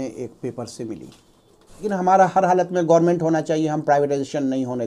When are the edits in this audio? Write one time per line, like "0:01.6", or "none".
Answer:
0:01.9